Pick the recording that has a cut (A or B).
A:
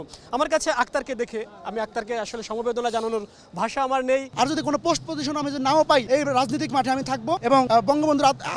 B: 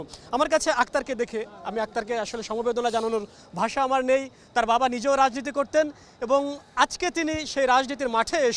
A